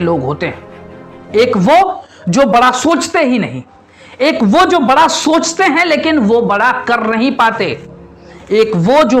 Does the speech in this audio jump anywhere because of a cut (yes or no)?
no